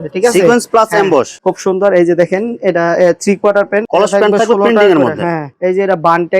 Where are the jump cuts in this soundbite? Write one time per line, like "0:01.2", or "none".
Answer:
0:01.4
0:03.9